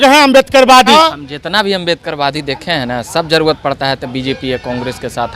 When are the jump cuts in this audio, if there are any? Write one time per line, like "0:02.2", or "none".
0:00.9